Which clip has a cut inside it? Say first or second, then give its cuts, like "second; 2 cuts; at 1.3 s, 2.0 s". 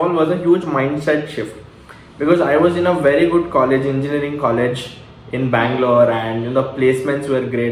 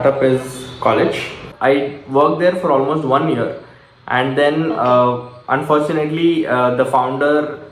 second; 1 cut; at 1.5 s